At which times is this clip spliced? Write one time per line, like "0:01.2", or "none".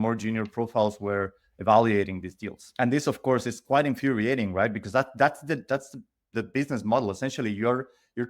0:02.6